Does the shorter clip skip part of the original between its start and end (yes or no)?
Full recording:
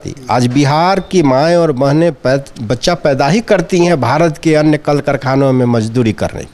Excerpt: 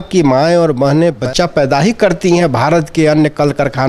yes